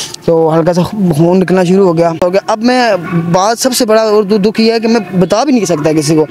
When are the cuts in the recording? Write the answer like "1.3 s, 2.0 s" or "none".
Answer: 2.2 s